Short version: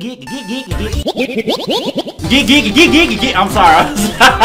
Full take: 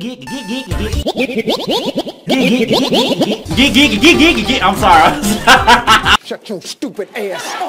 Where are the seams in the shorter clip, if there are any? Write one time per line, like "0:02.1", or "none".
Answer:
0:02.2